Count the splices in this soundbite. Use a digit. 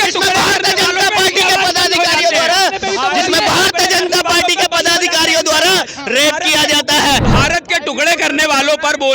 1